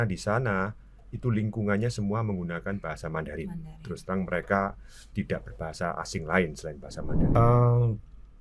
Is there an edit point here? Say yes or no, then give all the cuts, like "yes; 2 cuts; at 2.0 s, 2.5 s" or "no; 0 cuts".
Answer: yes; 1 cut; at 7.4 s